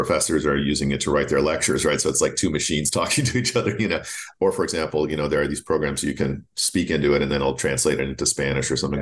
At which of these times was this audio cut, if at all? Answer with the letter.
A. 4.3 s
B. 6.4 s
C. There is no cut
A